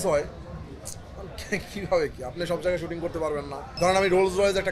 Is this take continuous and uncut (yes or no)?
no